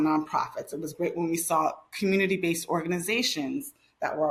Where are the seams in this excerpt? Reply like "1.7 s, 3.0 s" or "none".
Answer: none